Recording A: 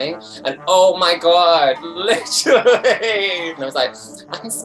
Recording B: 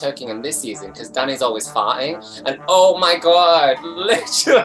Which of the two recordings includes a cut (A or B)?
A